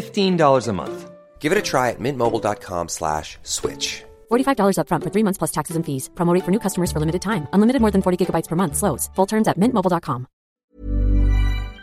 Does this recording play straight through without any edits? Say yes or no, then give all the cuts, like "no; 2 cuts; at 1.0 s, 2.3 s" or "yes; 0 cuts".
no; 1 cut; at 10.4 s